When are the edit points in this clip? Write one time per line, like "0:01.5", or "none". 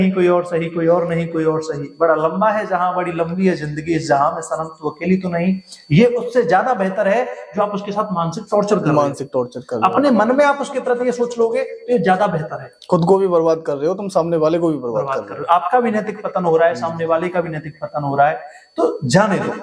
none